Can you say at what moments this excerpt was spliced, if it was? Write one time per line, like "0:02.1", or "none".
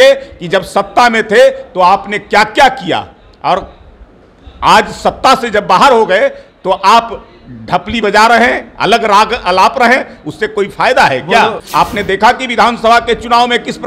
0:11.6